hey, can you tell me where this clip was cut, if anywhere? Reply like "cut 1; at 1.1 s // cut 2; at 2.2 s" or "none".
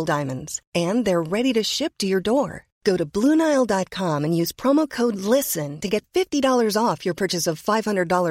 none